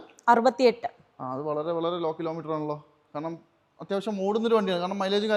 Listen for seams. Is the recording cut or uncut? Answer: uncut